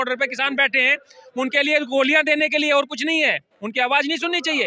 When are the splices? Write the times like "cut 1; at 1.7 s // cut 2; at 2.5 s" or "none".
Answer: none